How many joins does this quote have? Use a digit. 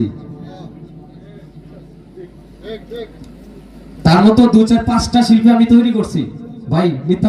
0